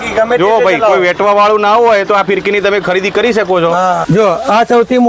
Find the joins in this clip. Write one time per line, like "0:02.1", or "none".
0:04.0